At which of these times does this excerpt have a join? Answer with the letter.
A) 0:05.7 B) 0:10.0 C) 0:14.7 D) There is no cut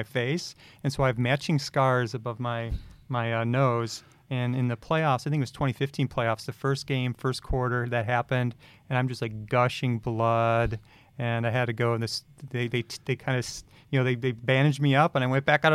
D